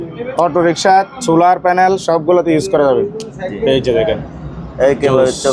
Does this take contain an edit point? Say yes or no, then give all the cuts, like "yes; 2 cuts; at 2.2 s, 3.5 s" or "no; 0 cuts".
no; 0 cuts